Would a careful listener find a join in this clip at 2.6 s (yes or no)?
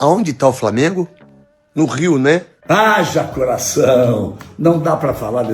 yes